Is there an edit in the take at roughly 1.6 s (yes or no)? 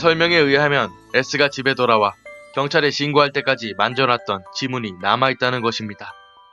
yes